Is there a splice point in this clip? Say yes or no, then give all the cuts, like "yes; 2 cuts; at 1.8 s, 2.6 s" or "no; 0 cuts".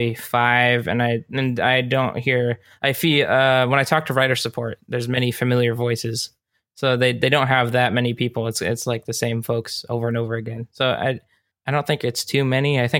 yes; 1 cut; at 11.5 s